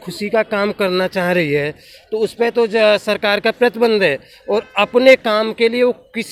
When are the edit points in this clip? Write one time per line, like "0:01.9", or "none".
none